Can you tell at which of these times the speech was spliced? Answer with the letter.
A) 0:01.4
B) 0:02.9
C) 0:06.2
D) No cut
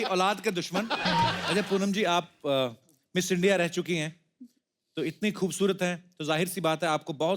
A